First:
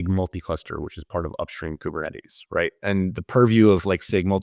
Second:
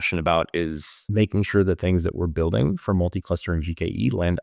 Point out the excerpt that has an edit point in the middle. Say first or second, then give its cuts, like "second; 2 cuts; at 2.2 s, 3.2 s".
second; 1 cut; at 1.0 s